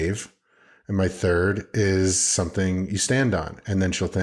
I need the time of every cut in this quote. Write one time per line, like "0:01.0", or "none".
none